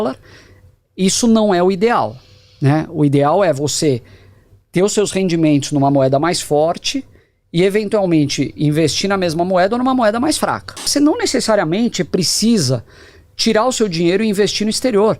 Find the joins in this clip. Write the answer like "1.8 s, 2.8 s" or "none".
10.9 s